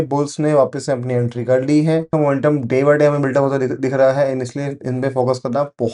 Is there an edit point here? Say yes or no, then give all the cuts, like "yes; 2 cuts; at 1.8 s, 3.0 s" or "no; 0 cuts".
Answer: yes; 1 cut; at 2.1 s